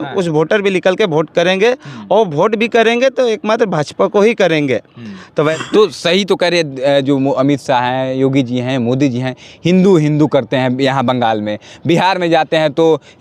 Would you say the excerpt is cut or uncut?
cut